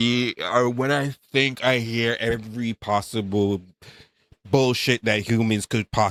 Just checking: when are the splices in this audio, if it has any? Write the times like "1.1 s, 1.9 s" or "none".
none